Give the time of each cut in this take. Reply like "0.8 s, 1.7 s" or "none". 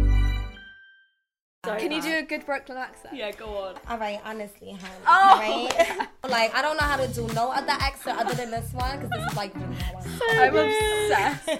1.6 s, 3.8 s, 6.2 s